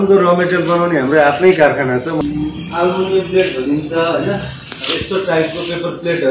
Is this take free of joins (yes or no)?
no